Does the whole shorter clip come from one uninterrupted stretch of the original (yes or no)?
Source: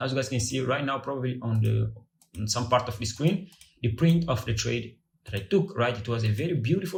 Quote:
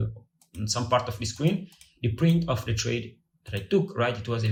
yes